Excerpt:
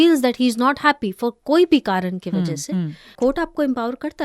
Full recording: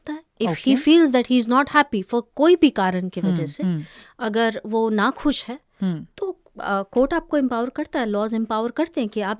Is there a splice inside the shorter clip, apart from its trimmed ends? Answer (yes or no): yes